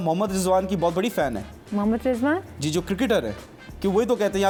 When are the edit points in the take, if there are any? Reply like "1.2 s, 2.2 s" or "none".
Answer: none